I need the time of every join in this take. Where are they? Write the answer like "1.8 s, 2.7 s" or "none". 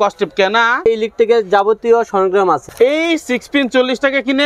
0.9 s, 2.6 s